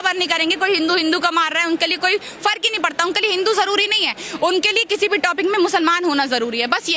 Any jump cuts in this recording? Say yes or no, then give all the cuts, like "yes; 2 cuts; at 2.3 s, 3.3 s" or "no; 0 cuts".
no; 0 cuts